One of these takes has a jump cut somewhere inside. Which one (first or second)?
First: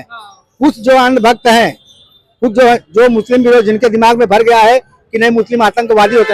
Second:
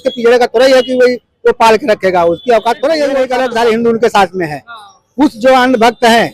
second